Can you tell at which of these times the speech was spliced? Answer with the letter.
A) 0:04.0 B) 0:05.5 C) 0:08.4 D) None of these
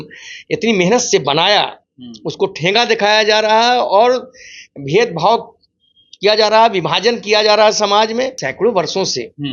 C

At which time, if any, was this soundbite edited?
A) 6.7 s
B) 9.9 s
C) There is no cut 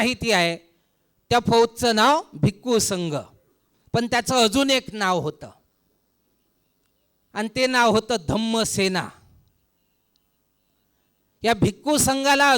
C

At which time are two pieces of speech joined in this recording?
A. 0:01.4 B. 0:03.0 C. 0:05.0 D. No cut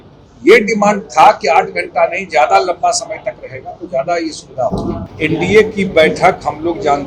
C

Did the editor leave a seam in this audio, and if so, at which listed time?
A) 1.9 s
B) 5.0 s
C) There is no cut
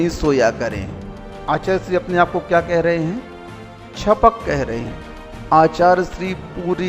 B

